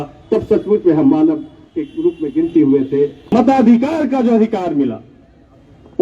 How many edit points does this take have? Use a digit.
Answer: 1